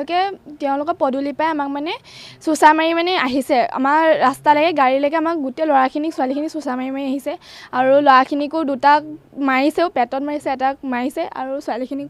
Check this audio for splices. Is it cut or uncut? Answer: uncut